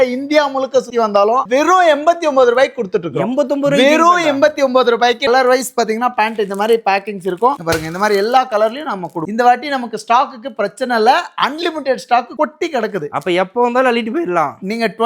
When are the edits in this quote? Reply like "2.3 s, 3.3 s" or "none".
1.4 s, 5.3 s, 9.2 s